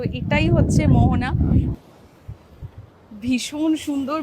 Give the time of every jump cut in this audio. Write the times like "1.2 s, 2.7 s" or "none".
1.7 s